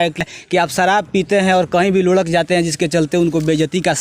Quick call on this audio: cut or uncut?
uncut